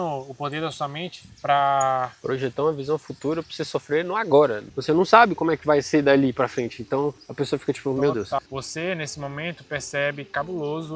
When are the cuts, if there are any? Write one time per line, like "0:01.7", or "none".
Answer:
0:04.7
0:08.5